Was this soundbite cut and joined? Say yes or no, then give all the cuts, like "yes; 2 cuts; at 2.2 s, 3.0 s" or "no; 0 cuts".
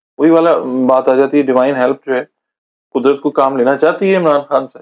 no; 0 cuts